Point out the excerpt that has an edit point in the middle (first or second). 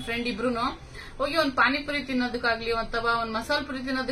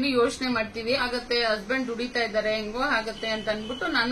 second